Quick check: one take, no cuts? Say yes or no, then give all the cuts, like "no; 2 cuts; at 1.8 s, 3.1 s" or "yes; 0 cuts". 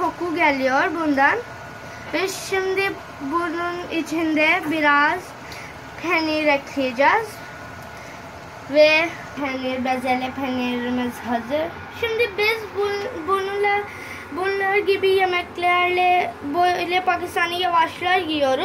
no; 1 cut; at 9.2 s